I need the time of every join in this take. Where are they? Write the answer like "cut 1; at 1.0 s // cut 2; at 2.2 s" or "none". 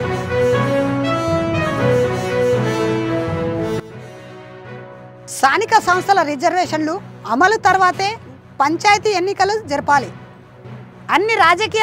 none